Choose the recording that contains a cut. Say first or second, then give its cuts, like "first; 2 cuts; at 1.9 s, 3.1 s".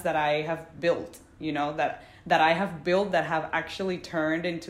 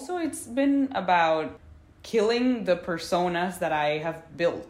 second; 1 cut; at 1.5 s